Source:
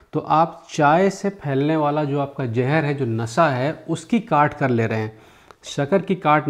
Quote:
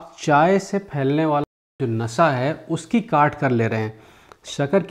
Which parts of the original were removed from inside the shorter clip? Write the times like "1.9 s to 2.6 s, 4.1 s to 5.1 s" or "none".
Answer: 2.2 s to 2.9 s